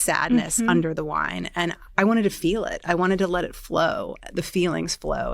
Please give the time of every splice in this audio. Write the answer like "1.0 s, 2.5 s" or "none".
1.8 s